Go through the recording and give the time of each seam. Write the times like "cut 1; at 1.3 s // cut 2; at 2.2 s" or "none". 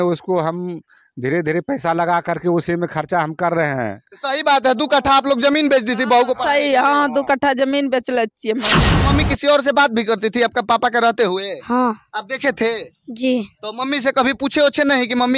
cut 1; at 8.9 s